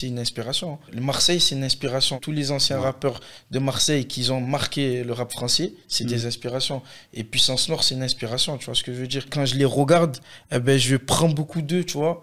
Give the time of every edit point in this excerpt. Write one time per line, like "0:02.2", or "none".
0:00.9
0:02.2
0:09.3